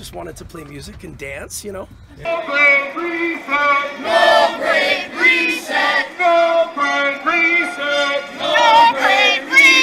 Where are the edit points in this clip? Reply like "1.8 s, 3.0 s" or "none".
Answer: 2.2 s